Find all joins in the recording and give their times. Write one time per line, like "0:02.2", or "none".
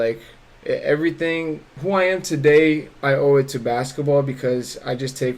0:01.7